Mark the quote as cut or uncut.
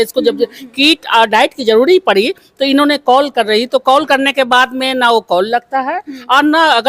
uncut